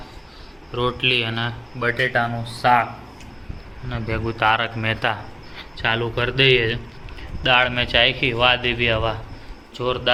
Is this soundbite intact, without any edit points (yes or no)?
yes